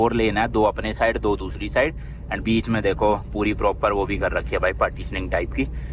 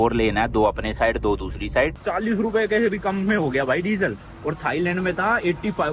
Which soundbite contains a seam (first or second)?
second